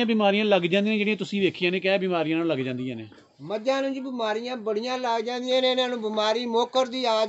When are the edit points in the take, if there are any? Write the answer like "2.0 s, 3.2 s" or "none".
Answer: none